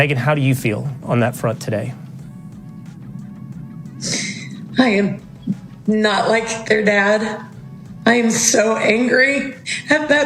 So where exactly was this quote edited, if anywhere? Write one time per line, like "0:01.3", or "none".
none